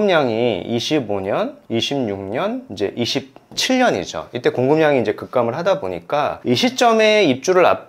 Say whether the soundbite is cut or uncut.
uncut